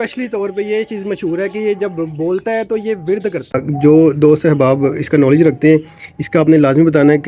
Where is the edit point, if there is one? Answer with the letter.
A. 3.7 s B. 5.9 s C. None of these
A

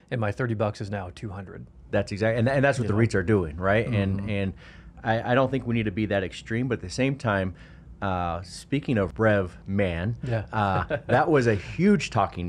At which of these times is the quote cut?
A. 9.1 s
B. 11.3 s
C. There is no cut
A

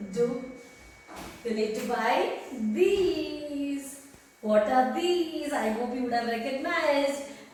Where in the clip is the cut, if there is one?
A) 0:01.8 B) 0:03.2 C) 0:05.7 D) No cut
D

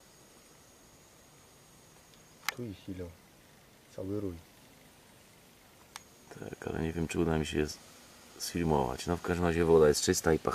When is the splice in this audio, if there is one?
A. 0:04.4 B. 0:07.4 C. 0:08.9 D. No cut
A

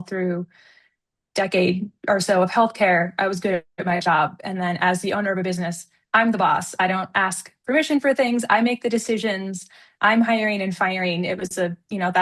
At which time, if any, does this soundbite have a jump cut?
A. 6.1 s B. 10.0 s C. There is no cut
C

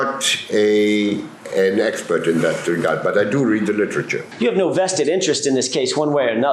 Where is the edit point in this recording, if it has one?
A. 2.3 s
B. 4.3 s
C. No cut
B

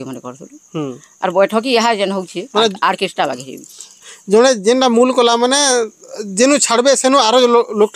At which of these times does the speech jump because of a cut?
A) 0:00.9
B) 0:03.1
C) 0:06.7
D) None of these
D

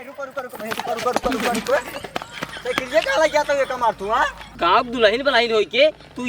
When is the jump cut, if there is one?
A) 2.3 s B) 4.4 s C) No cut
B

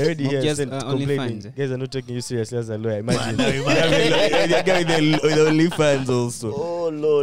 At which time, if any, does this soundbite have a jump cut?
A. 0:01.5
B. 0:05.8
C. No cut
C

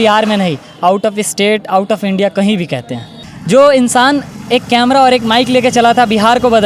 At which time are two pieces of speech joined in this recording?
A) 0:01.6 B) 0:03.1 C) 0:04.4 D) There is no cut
B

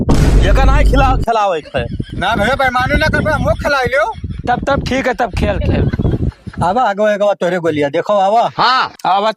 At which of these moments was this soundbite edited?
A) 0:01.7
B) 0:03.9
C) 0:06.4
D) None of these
C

